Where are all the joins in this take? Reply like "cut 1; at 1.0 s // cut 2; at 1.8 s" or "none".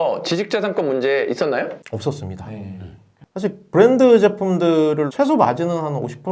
cut 1; at 3.2 s // cut 2; at 5.1 s